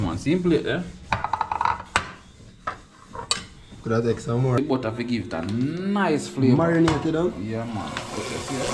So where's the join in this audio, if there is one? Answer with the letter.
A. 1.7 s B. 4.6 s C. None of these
B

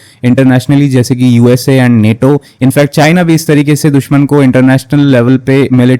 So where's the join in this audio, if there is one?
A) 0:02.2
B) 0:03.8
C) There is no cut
C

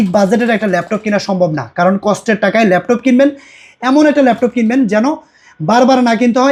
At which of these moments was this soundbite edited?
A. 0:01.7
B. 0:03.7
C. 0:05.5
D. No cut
D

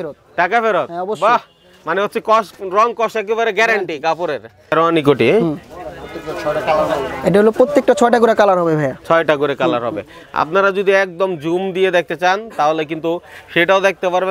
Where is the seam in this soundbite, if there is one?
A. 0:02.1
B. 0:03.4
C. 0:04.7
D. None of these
C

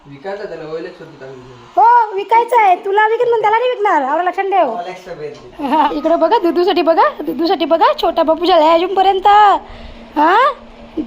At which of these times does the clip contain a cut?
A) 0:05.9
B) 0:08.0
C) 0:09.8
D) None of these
A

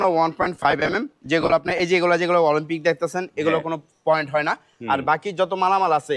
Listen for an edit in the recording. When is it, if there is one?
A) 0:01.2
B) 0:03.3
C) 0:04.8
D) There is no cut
D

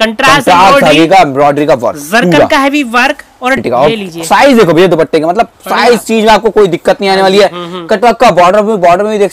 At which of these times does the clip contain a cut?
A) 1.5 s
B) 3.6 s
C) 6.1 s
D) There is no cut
B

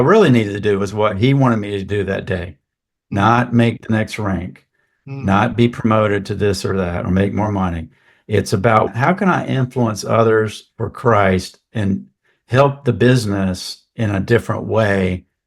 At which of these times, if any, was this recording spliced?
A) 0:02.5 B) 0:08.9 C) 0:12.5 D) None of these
B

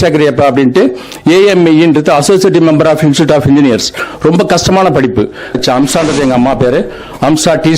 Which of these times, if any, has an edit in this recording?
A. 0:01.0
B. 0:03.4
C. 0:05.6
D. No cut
C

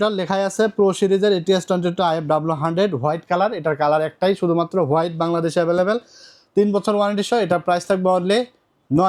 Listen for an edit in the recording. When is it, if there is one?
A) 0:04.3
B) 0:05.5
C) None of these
C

